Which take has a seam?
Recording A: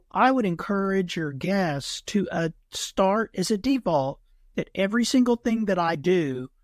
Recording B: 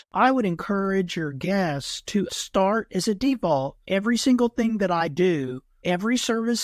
B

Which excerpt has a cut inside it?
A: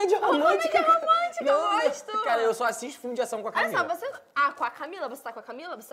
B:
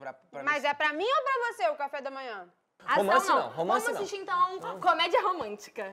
B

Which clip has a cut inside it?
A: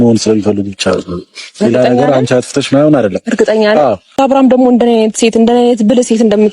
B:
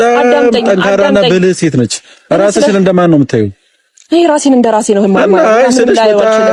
A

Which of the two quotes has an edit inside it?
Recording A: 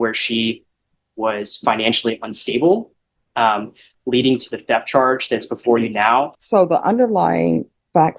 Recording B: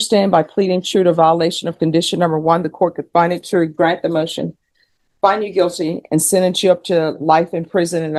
A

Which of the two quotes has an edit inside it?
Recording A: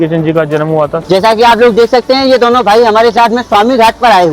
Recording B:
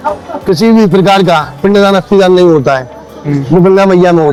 A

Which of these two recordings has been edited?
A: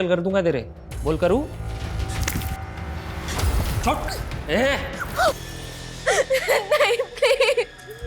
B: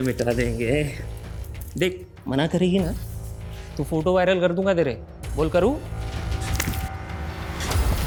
A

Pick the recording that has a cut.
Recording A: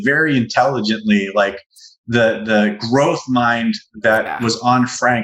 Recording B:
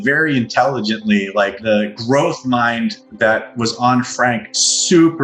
B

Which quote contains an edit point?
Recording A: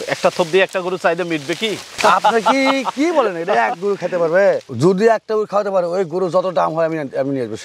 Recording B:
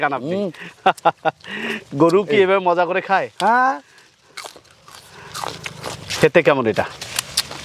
B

